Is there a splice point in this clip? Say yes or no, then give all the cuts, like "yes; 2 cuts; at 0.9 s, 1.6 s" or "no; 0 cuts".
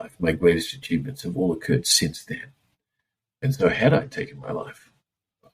no; 0 cuts